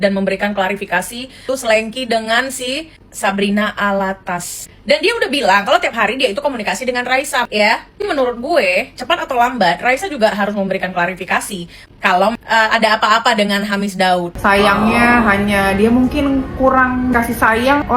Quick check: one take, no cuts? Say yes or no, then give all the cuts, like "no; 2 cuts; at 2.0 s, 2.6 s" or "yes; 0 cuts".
no; 4 cuts; at 1.4 s, 7.5 s, 12.3 s, 14.3 s